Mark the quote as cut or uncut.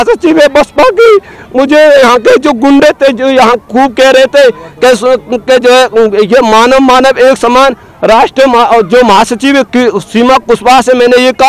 uncut